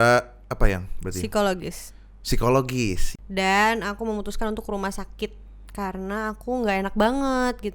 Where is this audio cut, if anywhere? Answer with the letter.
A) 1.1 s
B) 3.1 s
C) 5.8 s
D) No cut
B